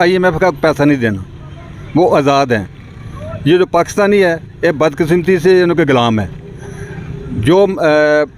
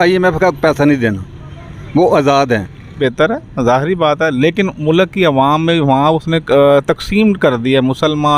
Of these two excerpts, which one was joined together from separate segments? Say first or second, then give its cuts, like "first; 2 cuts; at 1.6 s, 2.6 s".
second; 1 cut; at 3.0 s